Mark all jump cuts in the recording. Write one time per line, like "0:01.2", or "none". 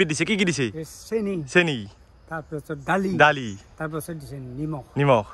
none